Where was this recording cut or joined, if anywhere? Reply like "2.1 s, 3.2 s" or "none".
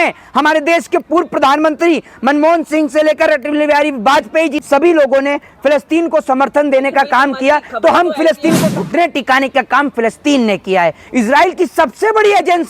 4.6 s, 8.7 s